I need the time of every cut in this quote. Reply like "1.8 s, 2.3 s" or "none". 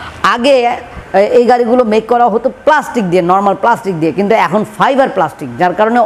none

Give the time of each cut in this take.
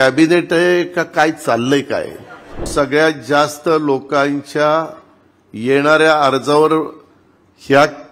2.7 s

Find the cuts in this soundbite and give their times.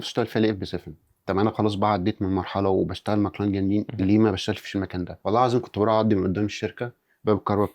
3.9 s, 5.1 s

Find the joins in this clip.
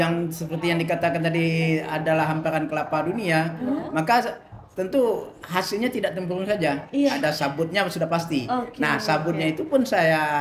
none

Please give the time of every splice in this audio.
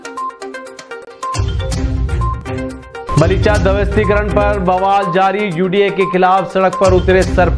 0.9 s

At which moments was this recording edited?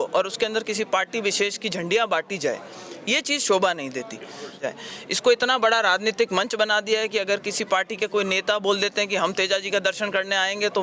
4.7 s

